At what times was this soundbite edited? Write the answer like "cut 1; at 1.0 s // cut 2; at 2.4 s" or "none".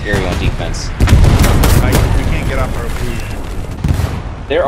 cut 1; at 3.7 s